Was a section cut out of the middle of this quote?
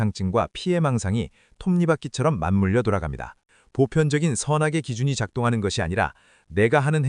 yes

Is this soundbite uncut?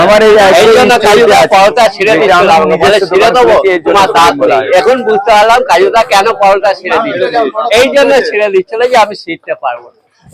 yes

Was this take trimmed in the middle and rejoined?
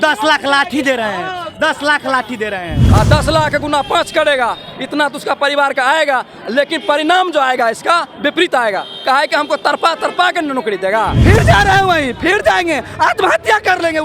yes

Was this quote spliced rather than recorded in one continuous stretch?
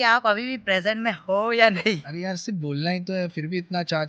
yes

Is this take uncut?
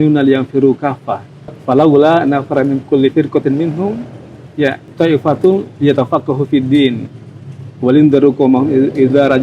no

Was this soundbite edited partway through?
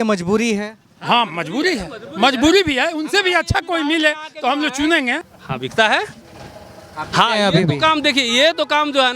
yes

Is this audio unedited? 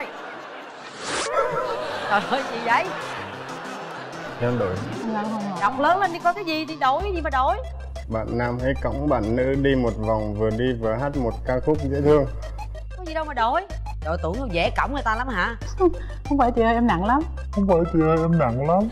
yes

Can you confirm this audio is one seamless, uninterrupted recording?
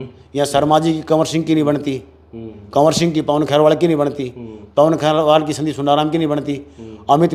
yes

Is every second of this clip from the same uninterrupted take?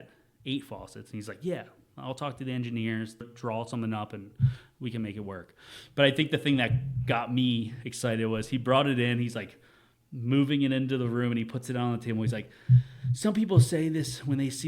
no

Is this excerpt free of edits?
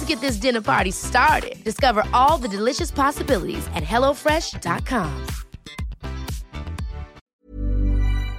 no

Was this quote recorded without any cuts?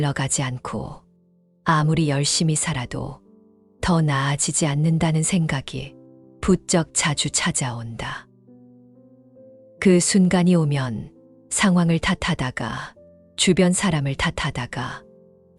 yes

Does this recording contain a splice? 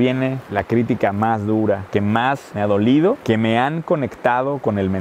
no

